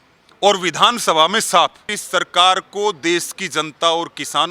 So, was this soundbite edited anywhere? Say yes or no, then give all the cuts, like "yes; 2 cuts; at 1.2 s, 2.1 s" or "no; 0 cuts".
yes; 1 cut; at 1.9 s